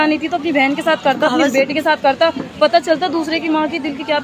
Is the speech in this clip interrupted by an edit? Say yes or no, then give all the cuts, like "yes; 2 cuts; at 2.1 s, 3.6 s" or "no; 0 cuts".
no; 0 cuts